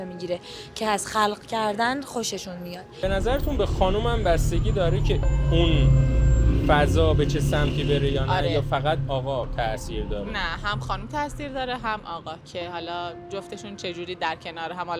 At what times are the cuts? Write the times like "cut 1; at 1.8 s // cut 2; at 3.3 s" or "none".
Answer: cut 1; at 3.0 s